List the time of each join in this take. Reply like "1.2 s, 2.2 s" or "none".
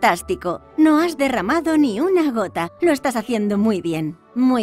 none